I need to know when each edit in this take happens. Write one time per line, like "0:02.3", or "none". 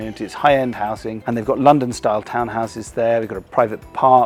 none